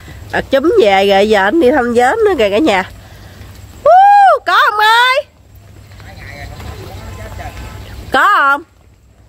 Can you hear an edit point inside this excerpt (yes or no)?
no